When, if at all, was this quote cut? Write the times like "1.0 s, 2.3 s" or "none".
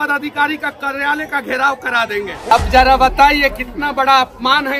2.5 s